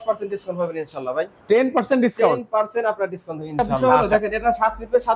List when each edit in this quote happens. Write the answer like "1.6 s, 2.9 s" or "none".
3.9 s